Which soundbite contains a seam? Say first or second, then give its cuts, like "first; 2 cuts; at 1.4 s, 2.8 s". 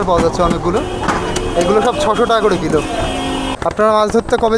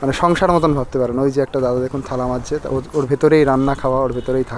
first; 1 cut; at 3.6 s